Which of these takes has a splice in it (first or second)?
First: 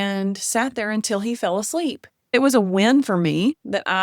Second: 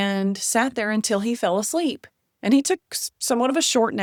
first